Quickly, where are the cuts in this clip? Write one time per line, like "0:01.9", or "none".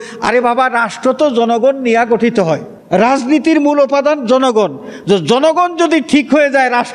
0:02.7

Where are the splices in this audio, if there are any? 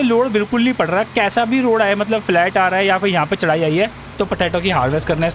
0:04.1

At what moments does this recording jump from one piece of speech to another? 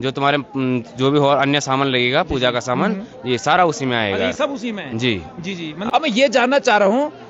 0:05.7

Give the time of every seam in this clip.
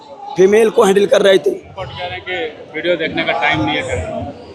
0:01.7

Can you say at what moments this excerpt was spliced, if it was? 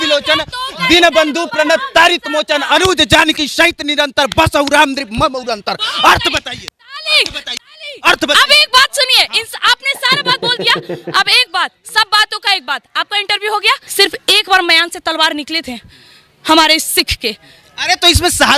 0:13.9

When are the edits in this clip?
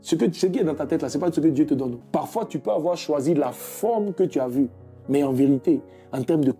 0:02.0

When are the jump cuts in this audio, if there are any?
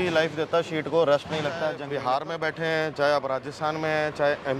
0:01.8

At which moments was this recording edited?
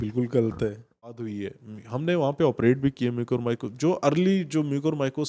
0:01.3

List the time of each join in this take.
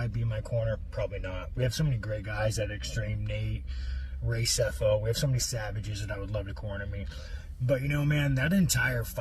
none

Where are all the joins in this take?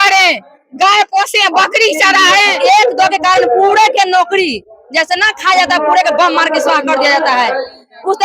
0:02.5

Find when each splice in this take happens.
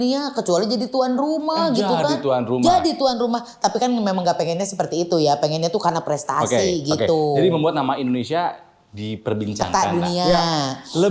none

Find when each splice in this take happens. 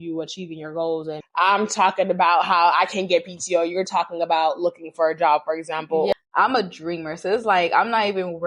0:01.2
0:06.1

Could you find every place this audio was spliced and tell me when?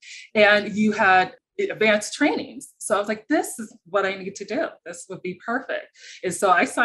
none

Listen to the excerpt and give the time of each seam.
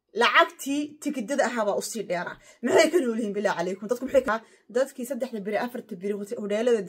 0:04.2

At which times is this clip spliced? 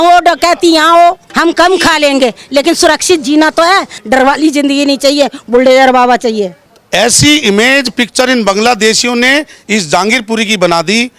0:01.3
0:04.0
0:06.6

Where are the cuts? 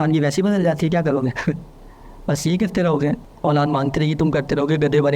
0:03.3

